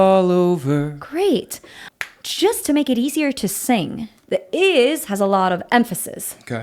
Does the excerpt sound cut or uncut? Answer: cut